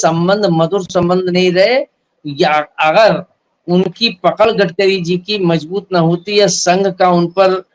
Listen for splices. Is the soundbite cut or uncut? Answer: uncut